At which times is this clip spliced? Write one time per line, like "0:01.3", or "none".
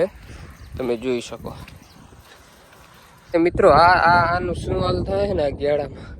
0:03.3